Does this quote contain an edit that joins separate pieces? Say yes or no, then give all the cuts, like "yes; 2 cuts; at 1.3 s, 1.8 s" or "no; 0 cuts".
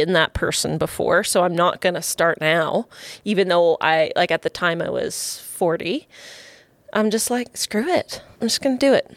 yes; 1 cut; at 8.3 s